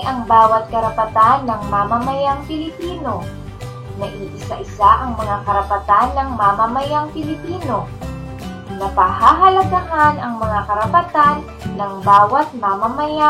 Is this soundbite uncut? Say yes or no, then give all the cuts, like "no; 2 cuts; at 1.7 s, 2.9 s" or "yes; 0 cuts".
yes; 0 cuts